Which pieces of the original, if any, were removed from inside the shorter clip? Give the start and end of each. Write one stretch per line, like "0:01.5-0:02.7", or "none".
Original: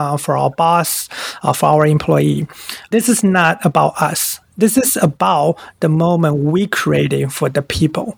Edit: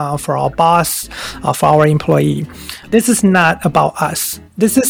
none